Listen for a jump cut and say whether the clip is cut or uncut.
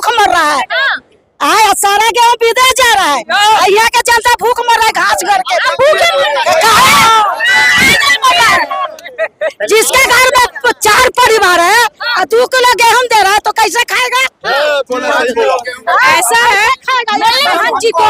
uncut